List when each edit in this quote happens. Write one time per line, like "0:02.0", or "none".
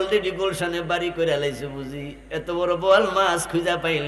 none